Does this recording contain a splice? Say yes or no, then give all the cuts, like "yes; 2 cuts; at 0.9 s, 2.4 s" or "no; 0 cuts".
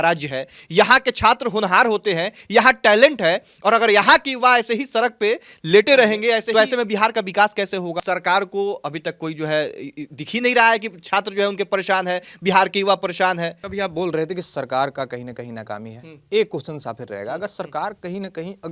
yes; 3 cuts; at 6.5 s, 8.0 s, 13.6 s